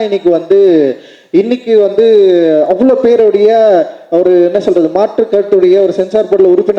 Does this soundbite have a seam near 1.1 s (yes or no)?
no